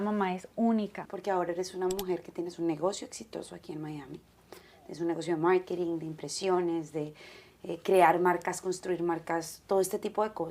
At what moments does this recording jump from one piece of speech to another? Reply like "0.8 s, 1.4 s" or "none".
1.1 s